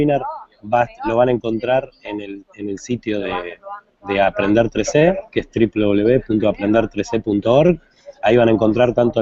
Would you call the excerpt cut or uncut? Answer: cut